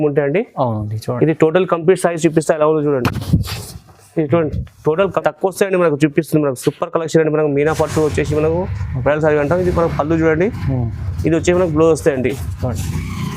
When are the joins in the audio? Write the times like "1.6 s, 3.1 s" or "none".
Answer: 5.2 s